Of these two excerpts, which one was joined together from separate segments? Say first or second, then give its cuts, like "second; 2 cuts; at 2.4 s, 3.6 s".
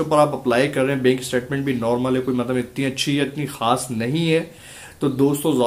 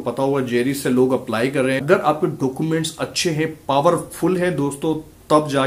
second; 1 cut; at 1.8 s